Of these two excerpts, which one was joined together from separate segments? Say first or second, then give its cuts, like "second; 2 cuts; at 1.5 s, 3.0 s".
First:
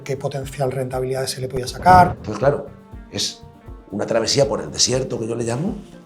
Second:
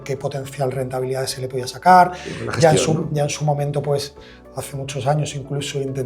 first; 1 cut; at 2.2 s